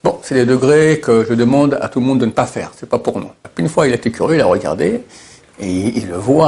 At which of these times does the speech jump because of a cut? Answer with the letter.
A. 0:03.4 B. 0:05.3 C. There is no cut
A